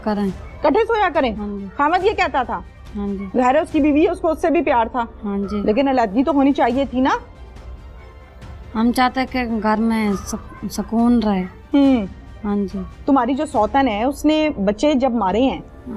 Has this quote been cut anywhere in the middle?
no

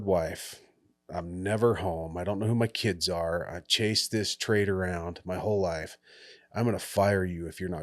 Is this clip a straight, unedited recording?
yes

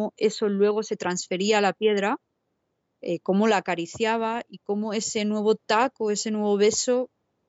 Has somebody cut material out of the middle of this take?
no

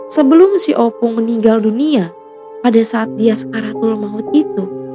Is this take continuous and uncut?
yes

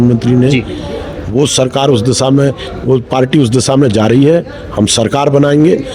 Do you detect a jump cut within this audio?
no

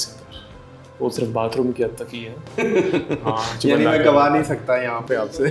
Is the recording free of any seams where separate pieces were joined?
yes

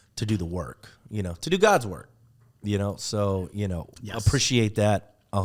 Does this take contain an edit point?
no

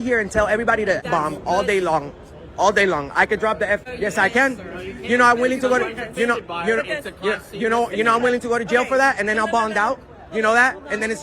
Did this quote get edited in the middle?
yes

